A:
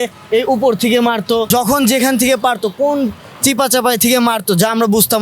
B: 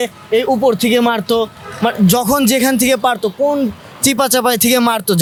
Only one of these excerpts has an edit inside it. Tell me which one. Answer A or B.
A